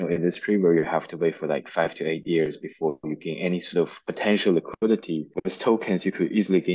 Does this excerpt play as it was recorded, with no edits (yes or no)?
no